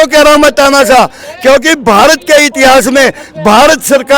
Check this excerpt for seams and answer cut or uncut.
uncut